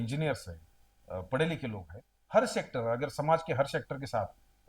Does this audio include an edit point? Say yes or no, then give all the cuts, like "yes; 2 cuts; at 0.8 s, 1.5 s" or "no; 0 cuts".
yes; 1 cut; at 2.1 s